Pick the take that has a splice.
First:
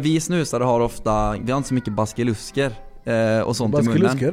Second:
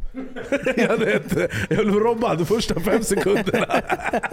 first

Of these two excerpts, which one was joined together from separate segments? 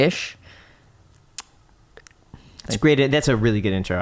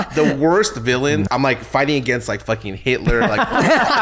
second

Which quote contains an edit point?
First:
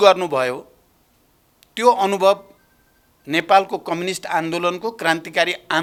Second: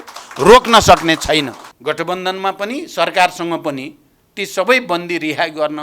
second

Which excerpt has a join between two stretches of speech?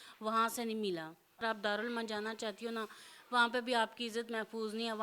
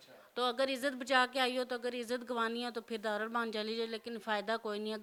first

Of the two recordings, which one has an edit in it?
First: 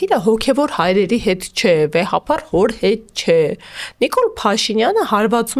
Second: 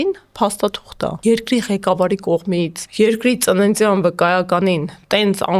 second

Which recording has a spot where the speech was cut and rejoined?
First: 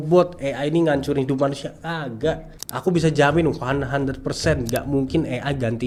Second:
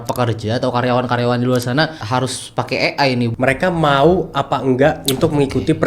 second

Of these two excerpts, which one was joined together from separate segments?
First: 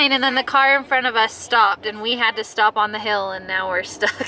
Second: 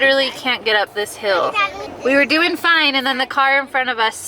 second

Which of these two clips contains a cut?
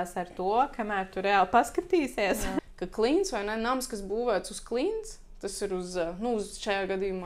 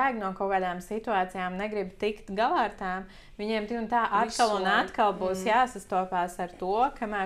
first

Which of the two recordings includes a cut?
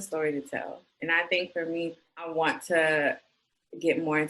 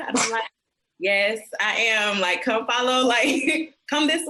first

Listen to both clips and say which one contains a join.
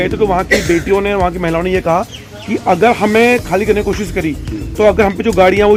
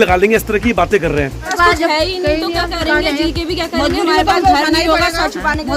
second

